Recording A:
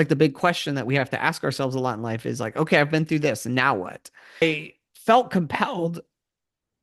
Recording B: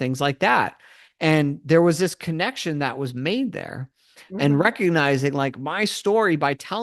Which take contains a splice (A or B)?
A